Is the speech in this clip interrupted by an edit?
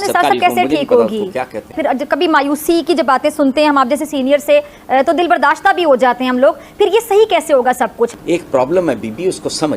yes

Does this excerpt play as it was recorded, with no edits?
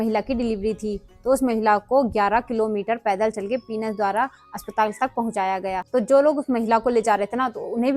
yes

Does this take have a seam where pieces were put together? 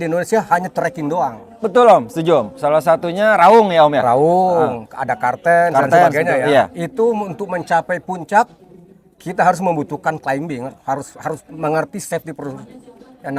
no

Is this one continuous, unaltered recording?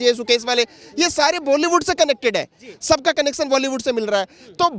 yes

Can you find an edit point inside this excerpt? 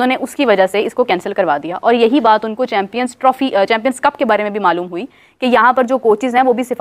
no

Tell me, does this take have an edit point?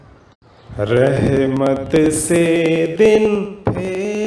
no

